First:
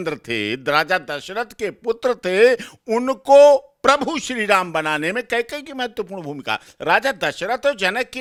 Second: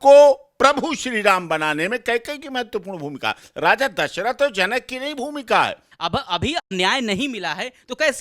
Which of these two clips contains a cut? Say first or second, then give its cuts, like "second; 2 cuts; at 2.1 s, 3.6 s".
second; 1 cut; at 5.9 s